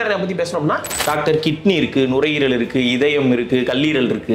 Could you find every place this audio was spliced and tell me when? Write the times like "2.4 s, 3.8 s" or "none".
0.9 s